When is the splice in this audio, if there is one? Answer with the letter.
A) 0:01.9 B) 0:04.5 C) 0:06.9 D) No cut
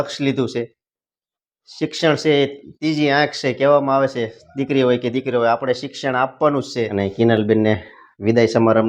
C